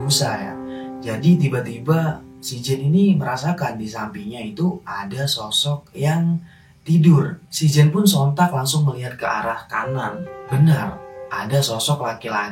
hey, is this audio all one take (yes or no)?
no